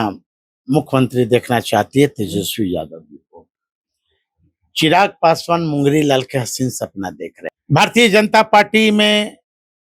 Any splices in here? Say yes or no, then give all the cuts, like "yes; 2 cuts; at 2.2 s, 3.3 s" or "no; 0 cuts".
yes; 1 cut; at 7.5 s